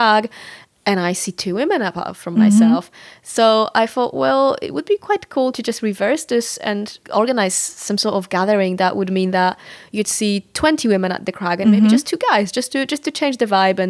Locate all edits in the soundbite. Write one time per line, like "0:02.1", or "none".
none